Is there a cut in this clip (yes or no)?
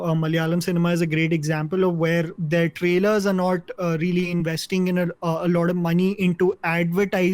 yes